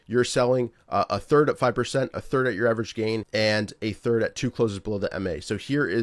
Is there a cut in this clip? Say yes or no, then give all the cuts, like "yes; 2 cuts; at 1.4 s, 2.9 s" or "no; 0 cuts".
yes; 1 cut; at 3.3 s